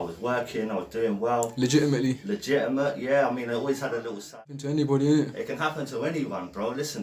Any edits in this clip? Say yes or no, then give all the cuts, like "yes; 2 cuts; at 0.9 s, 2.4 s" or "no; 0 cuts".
yes; 1 cut; at 4.4 s